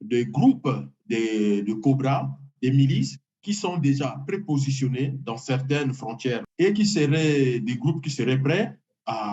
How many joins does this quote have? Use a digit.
1